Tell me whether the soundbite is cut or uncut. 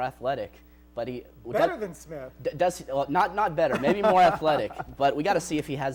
uncut